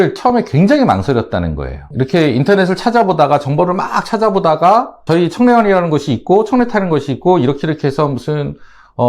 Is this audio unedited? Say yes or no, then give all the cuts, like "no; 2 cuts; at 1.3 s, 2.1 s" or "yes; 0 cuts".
no; 2 cuts; at 1.8 s, 5.0 s